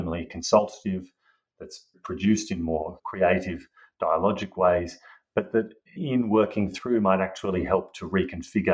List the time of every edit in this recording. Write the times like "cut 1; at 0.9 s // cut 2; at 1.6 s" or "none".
cut 1; at 2.0 s // cut 2; at 3.0 s // cut 3; at 6.0 s